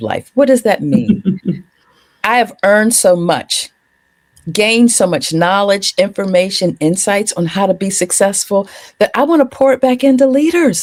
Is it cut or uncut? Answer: uncut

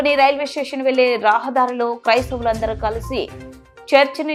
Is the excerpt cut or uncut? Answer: uncut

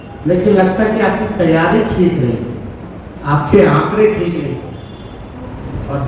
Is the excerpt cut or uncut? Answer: uncut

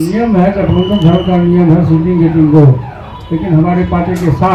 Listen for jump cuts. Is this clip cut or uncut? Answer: uncut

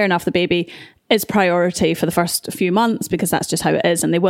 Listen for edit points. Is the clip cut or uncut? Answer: uncut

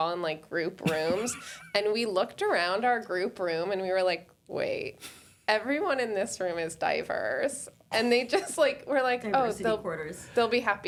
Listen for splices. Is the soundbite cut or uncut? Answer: uncut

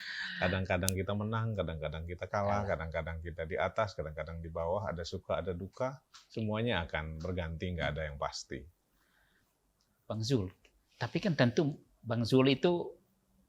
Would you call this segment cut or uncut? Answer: cut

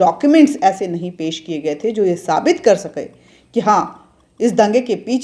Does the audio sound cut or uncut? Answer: uncut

